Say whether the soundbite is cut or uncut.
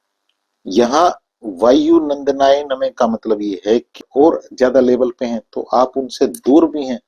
cut